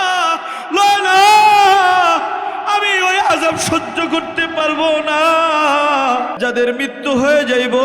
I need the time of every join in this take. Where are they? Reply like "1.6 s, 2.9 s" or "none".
6.3 s